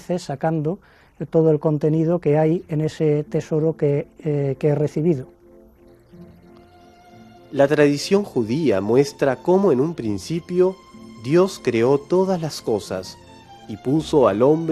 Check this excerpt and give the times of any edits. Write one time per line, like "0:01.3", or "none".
0:08.5